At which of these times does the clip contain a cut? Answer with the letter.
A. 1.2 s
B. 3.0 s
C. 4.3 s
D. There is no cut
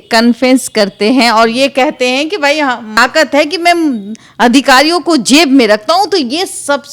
B